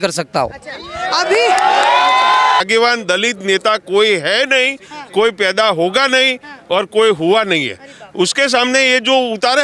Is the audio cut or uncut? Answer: cut